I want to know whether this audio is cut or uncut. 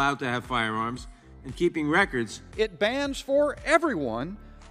cut